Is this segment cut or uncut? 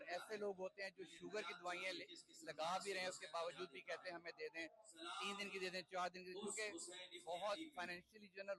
uncut